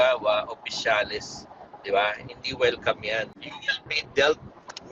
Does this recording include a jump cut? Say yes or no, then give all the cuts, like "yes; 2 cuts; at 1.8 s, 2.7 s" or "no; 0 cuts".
yes; 1 cut; at 3.5 s